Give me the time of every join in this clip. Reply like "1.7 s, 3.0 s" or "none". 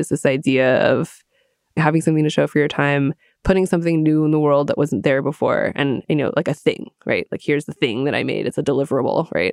none